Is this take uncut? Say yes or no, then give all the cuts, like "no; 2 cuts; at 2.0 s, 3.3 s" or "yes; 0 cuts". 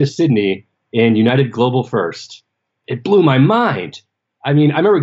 no; 1 cut; at 2.7 s